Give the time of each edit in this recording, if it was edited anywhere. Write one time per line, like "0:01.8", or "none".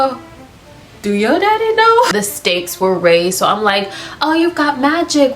0:02.1